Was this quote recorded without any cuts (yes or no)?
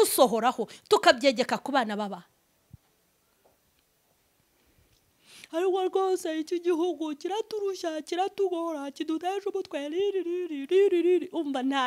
yes